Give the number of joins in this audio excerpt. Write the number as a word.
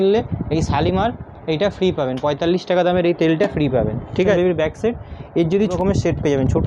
two